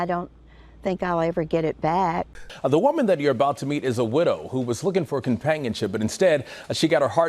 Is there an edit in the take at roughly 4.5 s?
no; 1 cut; at 2.5 s

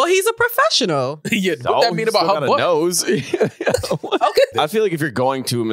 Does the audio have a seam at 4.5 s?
yes; 1 cut; at 4.5 s

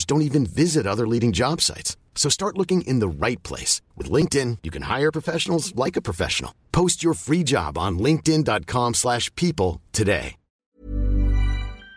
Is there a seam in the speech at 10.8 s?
yes; 1 cut; at 10.8 s

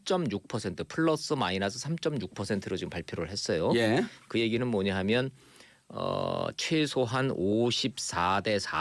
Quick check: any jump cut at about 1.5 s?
yes; 1 cut; at 1.5 s

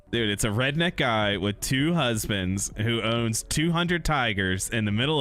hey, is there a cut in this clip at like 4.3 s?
no; 0 cuts

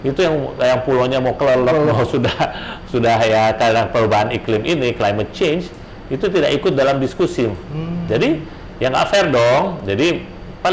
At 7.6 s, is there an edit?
no; 0 cuts

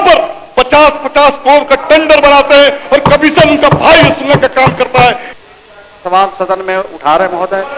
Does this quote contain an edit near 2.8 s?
no; 1 cut; at 5.3 s

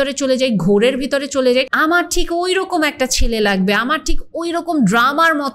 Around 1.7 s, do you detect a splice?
yes; 1 cut; at 1.7 s

